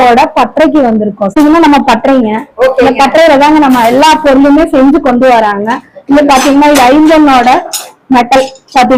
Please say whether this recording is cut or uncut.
uncut